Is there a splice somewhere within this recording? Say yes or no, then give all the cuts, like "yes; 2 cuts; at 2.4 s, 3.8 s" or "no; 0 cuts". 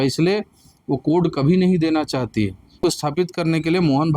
yes; 1 cut; at 2.9 s